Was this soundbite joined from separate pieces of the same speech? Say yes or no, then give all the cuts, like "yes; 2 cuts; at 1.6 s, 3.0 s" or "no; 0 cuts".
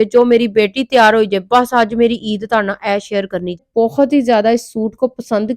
yes; 1 cut; at 3.7 s